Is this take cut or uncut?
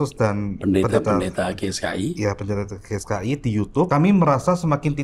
cut